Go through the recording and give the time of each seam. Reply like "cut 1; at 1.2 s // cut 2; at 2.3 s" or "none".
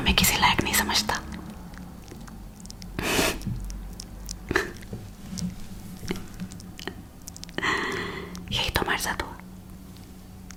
none